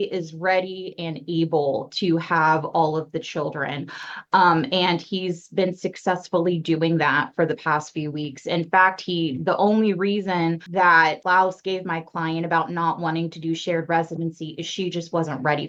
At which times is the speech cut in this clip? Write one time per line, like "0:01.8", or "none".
none